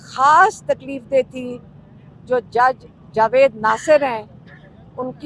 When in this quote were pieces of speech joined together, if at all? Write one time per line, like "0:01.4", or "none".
none